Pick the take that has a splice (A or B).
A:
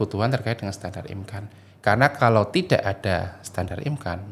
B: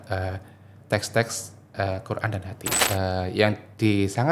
B